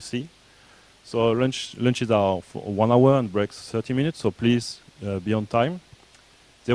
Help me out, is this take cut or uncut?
cut